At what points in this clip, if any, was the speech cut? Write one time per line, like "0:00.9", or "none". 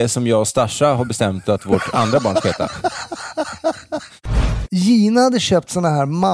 0:04.6